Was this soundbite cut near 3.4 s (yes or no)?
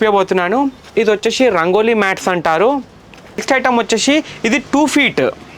yes